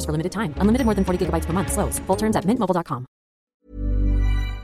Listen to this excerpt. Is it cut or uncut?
cut